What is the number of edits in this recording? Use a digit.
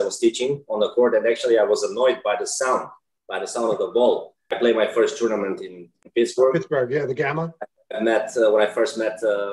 1